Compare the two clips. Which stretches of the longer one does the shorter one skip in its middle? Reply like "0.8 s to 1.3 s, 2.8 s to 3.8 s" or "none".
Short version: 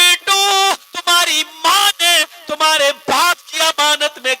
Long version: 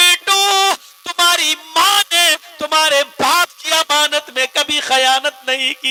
0.9 s to 1.0 s